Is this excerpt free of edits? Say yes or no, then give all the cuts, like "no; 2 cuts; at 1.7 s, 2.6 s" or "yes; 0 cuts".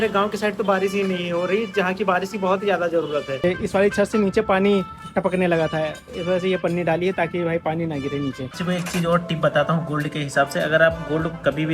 no; 2 cuts; at 3.4 s, 8.5 s